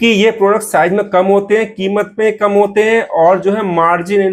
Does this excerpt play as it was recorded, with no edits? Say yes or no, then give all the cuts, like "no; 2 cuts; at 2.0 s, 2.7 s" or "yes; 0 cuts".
yes; 0 cuts